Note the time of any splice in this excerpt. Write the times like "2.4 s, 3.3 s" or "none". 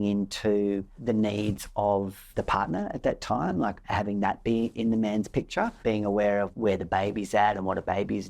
0.9 s, 2.2 s, 3.8 s, 4.8 s, 5.8 s